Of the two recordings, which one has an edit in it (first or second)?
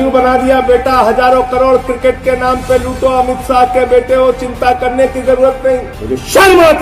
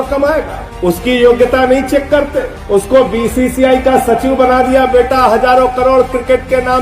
first